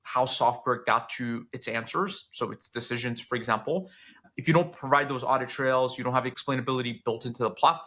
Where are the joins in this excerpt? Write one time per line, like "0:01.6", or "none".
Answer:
0:06.4